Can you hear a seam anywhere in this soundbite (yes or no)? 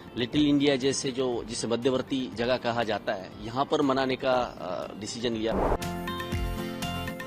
yes